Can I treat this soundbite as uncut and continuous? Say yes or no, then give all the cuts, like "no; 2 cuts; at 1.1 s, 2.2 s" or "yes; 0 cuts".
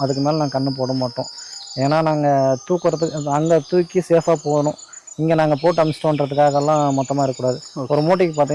yes; 0 cuts